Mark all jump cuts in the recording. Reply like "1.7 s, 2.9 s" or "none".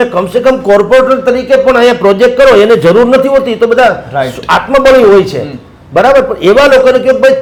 none